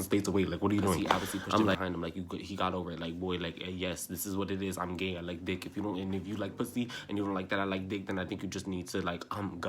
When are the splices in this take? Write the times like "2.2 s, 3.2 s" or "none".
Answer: 1.7 s